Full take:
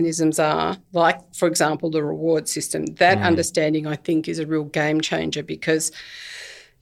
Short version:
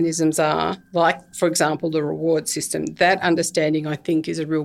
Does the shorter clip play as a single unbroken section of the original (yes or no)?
yes